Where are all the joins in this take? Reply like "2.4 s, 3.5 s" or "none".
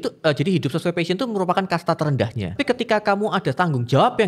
2.6 s